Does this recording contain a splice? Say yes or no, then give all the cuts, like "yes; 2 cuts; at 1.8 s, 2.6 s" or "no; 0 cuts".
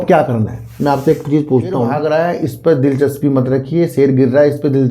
yes; 1 cut; at 1.9 s